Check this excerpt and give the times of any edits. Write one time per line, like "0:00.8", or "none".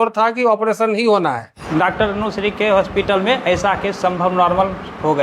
0:01.5